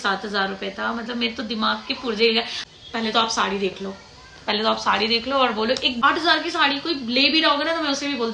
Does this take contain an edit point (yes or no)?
yes